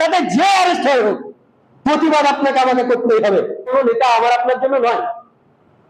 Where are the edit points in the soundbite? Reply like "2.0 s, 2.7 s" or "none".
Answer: 3.7 s